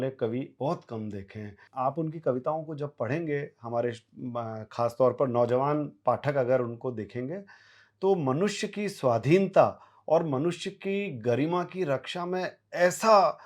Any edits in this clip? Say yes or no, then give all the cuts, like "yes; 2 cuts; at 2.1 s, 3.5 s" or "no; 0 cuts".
yes; 1 cut; at 1.6 s